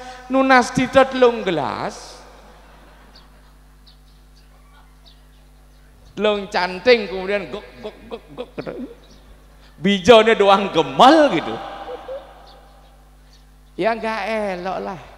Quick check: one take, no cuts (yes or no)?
no